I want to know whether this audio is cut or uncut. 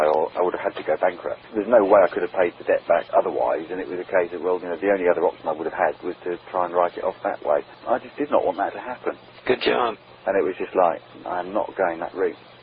uncut